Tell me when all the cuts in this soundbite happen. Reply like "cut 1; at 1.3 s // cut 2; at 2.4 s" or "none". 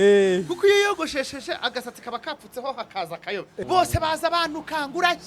cut 1; at 3.5 s